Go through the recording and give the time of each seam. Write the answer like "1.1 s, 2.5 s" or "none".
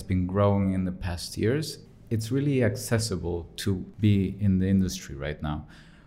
1.9 s, 3.9 s